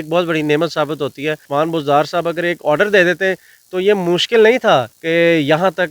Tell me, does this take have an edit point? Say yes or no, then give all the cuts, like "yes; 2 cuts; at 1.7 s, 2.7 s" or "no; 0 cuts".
yes; 2 cuts; at 1.4 s, 5.0 s